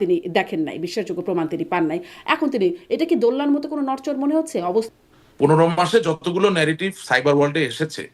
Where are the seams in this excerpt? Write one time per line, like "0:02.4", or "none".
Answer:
0:04.9